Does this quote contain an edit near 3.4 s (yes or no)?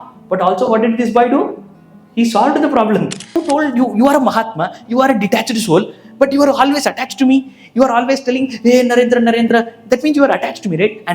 yes